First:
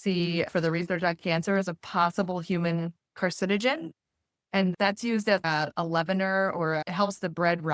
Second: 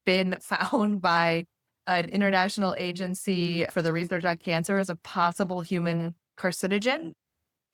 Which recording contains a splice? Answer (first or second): first